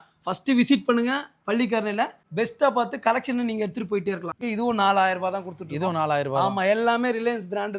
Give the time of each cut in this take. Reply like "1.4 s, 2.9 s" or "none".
4.3 s